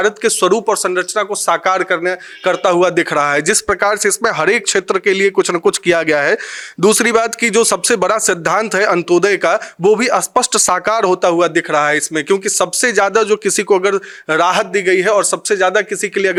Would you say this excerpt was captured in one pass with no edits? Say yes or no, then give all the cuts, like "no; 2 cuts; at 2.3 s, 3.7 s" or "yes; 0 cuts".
yes; 0 cuts